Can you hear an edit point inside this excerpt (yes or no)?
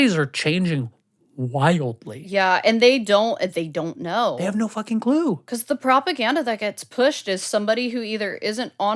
no